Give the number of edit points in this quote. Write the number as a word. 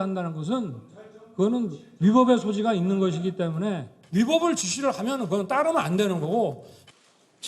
one